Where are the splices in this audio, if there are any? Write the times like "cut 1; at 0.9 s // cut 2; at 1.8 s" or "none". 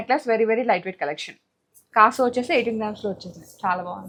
none